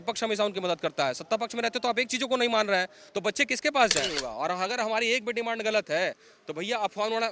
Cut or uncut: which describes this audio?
cut